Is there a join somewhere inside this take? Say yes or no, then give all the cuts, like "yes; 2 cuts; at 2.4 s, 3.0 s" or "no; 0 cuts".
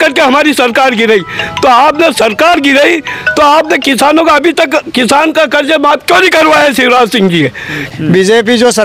yes; 1 cut; at 7.9 s